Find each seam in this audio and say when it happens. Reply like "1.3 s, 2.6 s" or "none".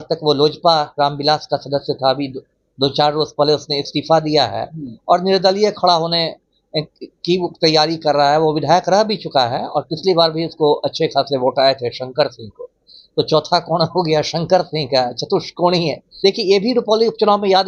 16.0 s

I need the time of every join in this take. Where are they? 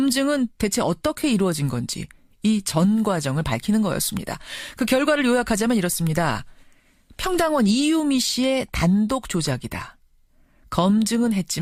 none

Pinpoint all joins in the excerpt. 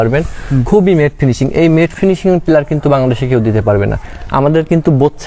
4.1 s

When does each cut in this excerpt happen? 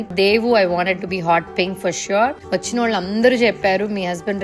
2.4 s

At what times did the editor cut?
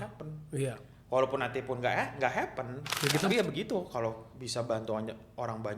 3.3 s

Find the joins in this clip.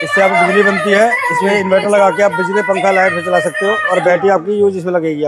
none

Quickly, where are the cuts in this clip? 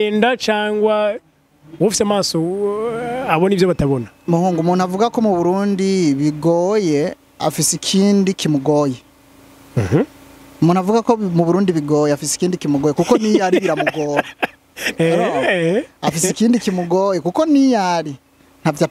none

